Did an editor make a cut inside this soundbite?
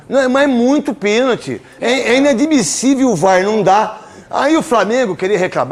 no; 0 cuts

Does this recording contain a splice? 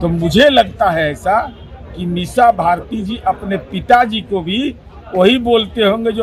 no; 0 cuts

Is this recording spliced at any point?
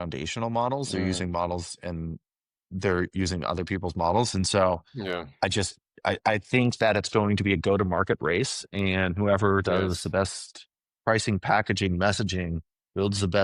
no; 0 cuts

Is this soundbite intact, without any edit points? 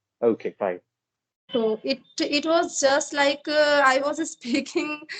yes; 0 cuts

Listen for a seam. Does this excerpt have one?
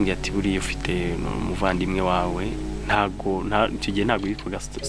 no; 0 cuts

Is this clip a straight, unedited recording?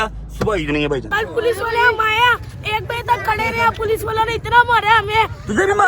no; 1 cut; at 1.1 s

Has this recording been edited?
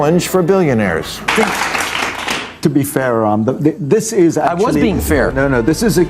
yes; 1 cut; at 1.1 s

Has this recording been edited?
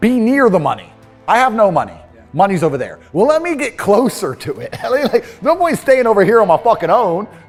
no; 0 cuts

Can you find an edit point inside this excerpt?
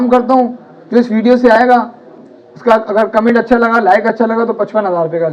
no; 0 cuts

